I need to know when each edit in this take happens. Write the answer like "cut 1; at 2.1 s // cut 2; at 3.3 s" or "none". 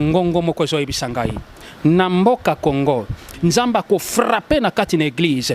cut 1; at 3.4 s